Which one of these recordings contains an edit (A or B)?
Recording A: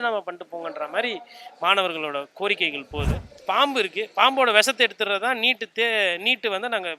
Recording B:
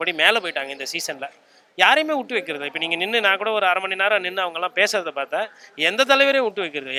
A